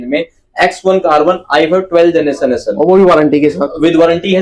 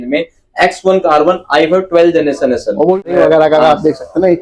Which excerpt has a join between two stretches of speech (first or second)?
second